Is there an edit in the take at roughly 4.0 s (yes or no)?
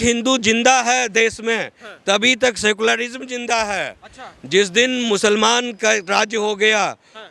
no